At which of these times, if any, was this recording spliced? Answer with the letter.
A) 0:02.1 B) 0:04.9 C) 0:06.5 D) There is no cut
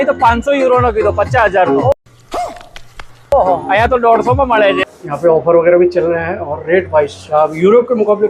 B